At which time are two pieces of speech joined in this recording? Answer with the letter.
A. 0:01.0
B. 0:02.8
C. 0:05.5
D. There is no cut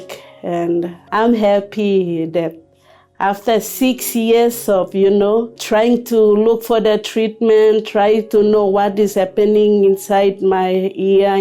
A